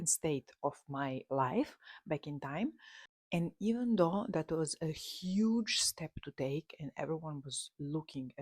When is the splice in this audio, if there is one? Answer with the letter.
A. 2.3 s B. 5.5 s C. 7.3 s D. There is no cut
D